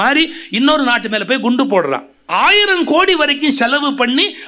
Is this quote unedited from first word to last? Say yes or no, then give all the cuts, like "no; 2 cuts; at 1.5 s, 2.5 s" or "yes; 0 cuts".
no; 1 cut; at 2.2 s